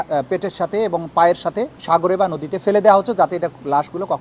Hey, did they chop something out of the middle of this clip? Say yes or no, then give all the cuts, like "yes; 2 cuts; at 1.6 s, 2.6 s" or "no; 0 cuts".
yes; 1 cut; at 1.7 s